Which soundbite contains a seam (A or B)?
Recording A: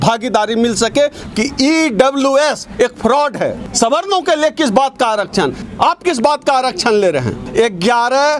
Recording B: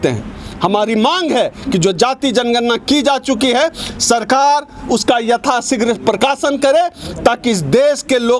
A